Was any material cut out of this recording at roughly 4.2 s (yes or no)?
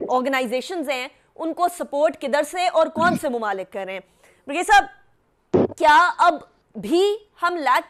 no